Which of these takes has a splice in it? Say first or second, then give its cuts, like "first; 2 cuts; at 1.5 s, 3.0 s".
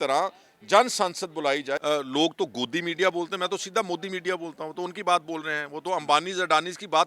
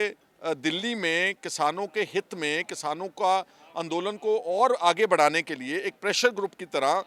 first; 1 cut; at 1.8 s